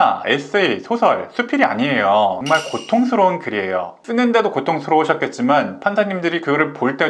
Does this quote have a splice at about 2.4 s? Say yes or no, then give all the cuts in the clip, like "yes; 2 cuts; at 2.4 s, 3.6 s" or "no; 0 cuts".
yes; 1 cut; at 2.4 s